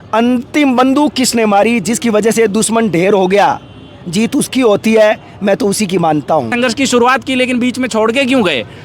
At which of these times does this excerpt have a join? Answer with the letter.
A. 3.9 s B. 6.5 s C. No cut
B